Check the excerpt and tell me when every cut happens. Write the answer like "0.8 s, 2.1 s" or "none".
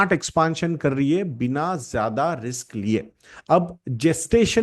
none